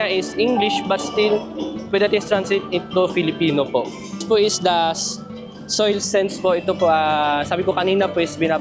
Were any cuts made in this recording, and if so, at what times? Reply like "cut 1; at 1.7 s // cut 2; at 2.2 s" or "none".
cut 1; at 4.2 s